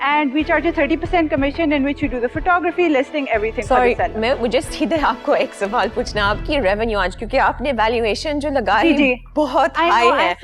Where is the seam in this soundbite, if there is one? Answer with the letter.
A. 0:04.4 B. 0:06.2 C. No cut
A